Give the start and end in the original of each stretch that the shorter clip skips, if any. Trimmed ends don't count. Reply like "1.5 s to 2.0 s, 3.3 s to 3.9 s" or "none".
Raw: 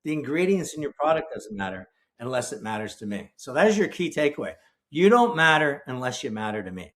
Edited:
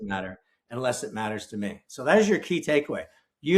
none